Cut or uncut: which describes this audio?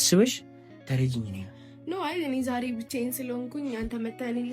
uncut